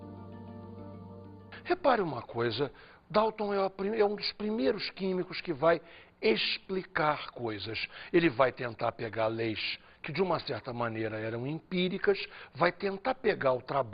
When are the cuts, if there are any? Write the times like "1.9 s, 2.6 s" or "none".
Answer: 10.6 s

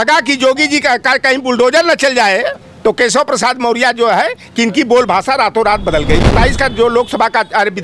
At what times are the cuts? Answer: 2.6 s, 6.3 s

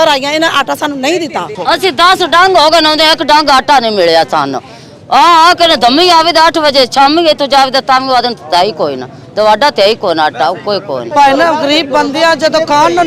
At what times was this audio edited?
1.4 s, 11.0 s

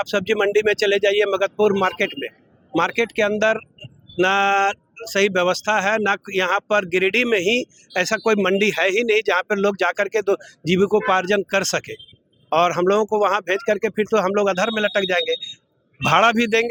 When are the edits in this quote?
none

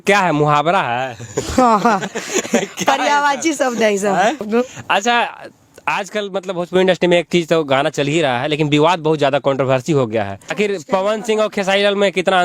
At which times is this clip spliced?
4.5 s, 10.5 s

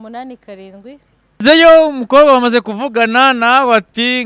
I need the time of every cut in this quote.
1.4 s

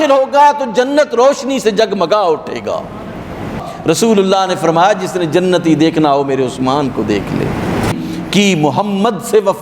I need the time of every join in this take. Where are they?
3.6 s, 7.9 s

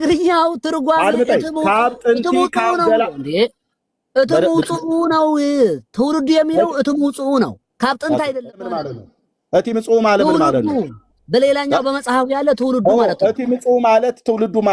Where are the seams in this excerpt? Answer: 8.7 s

